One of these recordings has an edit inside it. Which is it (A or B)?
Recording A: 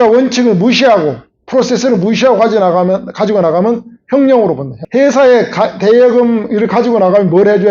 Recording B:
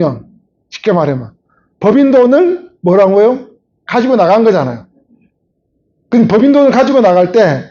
A